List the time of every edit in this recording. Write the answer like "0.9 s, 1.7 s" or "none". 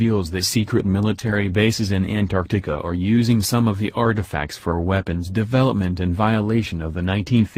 1.3 s